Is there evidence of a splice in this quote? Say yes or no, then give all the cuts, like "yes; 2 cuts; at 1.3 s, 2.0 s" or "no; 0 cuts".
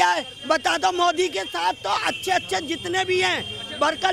no; 0 cuts